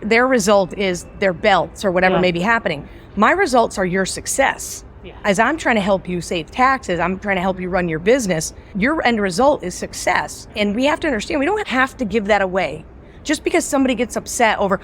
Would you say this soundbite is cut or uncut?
cut